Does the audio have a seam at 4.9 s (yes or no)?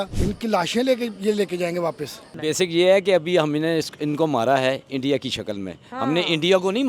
no